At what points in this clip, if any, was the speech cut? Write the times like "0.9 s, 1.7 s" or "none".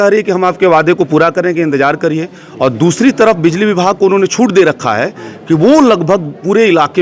none